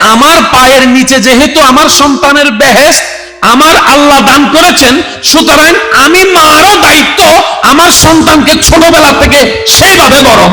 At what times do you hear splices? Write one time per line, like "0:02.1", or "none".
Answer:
none